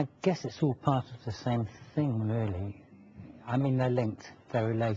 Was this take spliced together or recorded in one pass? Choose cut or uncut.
cut